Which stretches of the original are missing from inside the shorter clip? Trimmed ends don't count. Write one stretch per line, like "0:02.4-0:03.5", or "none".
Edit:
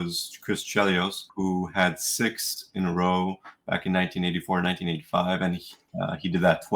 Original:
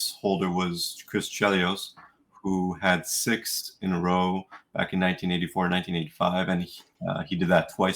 0:01.9-0:02.3